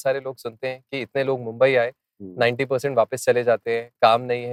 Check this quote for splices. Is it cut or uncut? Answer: uncut